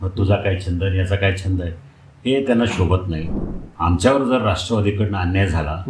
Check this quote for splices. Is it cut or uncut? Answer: cut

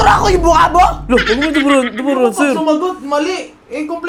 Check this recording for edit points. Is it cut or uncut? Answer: uncut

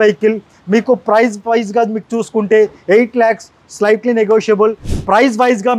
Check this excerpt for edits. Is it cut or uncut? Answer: cut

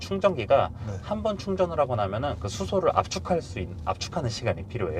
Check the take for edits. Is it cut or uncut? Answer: uncut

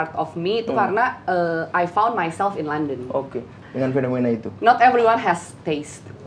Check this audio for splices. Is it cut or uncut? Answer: cut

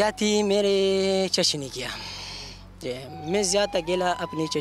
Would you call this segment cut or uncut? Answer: uncut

